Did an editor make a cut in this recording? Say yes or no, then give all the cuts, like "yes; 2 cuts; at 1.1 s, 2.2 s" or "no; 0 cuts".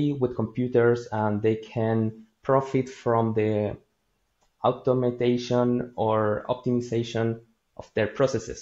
no; 0 cuts